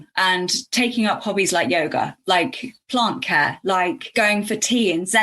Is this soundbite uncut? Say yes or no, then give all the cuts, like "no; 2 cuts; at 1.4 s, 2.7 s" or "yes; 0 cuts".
no; 1 cut; at 4.1 s